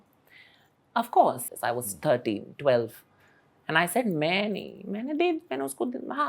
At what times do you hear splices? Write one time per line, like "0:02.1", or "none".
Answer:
0:01.4